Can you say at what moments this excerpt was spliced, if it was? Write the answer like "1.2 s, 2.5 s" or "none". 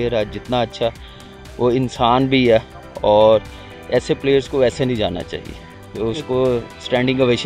none

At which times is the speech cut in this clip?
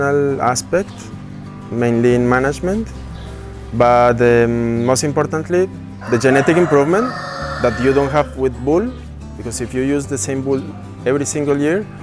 none

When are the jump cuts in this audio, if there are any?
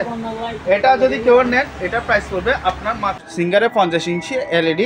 3.6 s

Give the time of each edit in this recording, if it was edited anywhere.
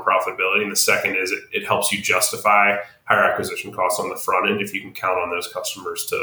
none

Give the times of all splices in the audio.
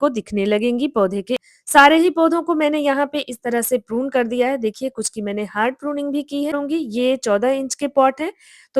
1.5 s, 6.6 s

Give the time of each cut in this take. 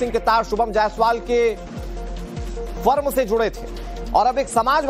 none

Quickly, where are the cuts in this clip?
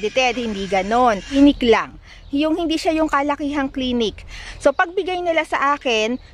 1.3 s, 4.4 s

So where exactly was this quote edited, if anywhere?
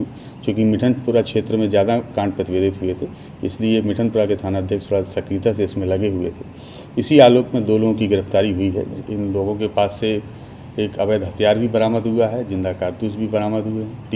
9.0 s

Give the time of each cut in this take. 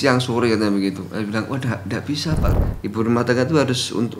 2.5 s

